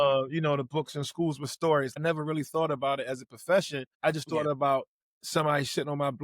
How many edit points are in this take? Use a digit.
2